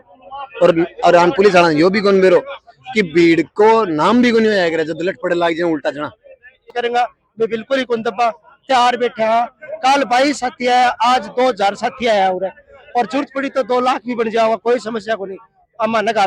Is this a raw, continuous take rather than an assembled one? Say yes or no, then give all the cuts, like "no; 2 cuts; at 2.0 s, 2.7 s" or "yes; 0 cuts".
no; 1 cut; at 6.7 s